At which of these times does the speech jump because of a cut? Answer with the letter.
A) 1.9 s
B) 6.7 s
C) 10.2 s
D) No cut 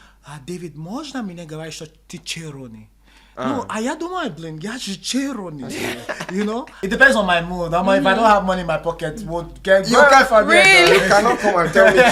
B